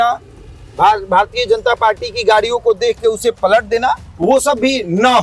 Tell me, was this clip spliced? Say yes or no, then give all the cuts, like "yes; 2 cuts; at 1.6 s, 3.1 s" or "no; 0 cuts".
no; 0 cuts